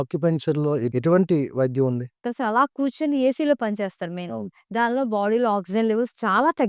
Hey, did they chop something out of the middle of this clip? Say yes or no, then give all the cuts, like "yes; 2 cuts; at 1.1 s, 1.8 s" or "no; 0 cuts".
yes; 1 cut; at 2.3 s